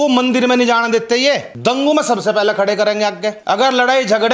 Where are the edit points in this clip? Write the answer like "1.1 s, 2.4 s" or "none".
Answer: 1.5 s, 3.4 s